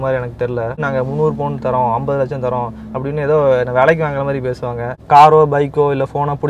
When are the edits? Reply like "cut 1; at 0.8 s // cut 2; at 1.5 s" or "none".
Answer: cut 1; at 0.8 s // cut 2; at 5.0 s